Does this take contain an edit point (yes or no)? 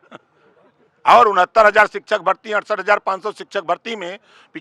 no